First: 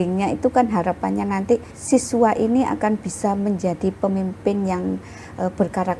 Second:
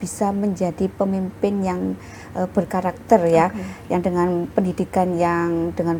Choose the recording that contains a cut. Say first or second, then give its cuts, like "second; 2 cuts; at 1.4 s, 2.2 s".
first; 1 cut; at 1.8 s